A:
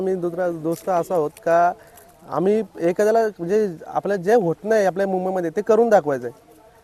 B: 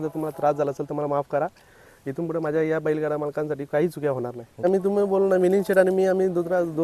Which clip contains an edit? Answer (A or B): B